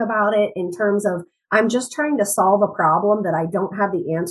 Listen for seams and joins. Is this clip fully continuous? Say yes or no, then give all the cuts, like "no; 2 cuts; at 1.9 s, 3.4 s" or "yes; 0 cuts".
yes; 0 cuts